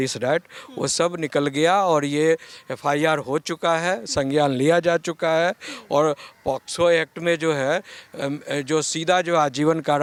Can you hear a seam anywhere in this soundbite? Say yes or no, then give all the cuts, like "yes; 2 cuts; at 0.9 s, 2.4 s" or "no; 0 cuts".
no; 0 cuts